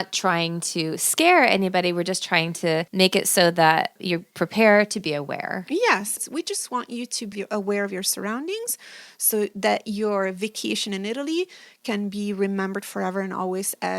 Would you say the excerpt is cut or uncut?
cut